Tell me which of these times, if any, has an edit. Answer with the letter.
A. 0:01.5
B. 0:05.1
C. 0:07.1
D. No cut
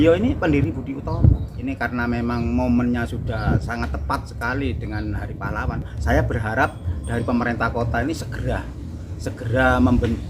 A